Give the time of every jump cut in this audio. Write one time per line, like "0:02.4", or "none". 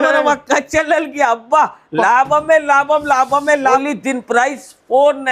0:03.8